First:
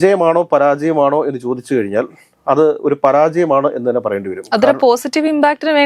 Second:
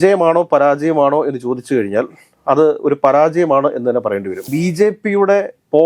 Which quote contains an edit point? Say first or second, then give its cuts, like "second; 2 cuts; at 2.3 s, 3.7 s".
second; 1 cut; at 4.4 s